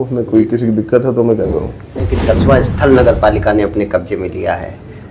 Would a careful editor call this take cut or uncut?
cut